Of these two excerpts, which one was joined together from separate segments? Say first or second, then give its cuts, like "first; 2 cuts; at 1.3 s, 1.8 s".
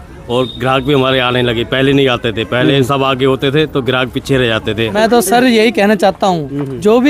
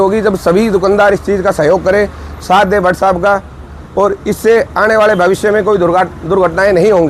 first; 1 cut; at 5.0 s